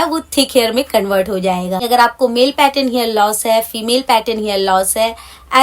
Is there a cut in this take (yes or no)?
yes